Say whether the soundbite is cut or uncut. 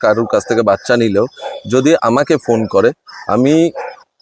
uncut